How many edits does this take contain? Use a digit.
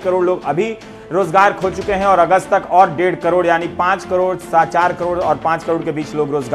0